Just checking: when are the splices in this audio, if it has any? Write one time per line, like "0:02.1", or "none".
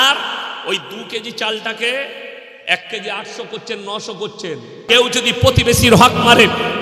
0:04.8